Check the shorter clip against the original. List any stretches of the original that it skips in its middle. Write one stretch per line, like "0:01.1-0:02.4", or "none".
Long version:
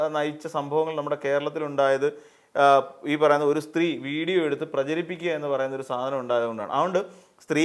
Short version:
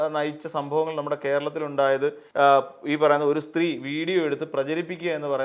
0:02.2-0:02.4